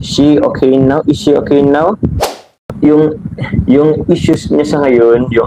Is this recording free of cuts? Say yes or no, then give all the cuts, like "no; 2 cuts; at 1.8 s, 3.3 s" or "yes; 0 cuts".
no; 1 cut; at 2.7 s